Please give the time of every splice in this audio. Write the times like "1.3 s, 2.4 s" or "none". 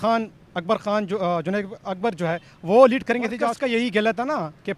3.4 s